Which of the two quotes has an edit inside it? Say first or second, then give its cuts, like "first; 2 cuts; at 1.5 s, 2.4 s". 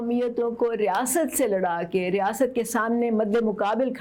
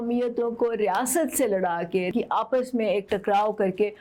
second; 1 cut; at 2.1 s